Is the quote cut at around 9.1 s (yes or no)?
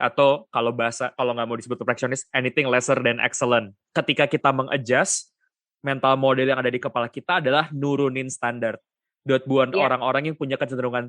no